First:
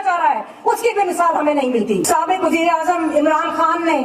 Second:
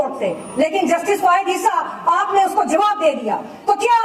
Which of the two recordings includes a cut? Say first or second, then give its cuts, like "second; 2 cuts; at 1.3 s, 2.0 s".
first; 1 cut; at 2.0 s